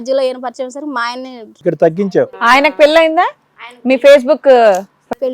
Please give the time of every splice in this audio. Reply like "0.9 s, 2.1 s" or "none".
1.4 s